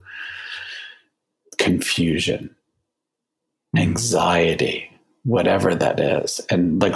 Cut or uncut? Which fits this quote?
uncut